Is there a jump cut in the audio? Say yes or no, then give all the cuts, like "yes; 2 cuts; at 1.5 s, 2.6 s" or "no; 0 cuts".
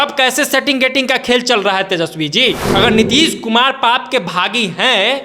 yes; 1 cut; at 2.6 s